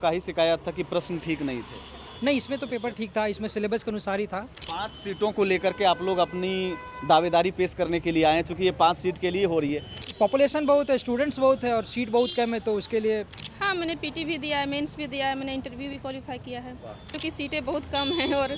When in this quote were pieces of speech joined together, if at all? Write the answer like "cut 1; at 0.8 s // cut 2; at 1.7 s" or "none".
cut 1; at 4.6 s // cut 2; at 9.9 s // cut 3; at 13.4 s // cut 4; at 17.1 s